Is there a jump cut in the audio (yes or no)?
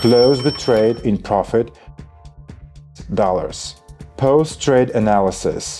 yes